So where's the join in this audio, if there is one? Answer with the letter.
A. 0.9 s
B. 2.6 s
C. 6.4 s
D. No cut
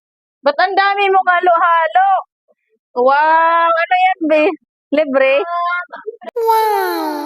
C